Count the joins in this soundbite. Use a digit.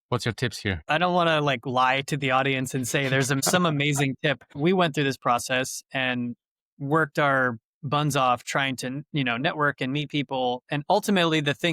3